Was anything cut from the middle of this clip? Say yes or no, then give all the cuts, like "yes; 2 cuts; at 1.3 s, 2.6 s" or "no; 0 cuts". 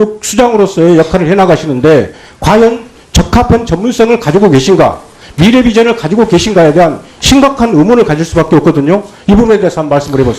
no; 0 cuts